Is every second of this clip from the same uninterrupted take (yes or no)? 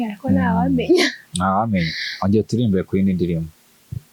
yes